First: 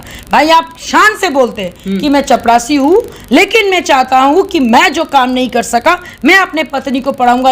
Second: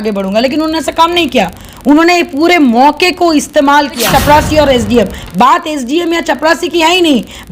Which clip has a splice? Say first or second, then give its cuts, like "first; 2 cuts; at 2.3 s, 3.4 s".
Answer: second; 1 cut; at 4.0 s